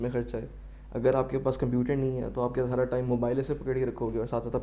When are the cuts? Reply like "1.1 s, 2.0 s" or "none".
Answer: none